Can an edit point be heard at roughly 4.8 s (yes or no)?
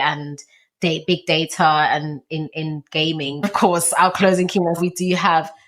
yes